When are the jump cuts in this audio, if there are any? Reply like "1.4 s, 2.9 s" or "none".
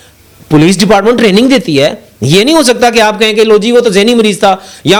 none